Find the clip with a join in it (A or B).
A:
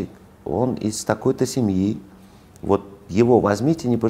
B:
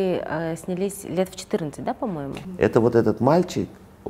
B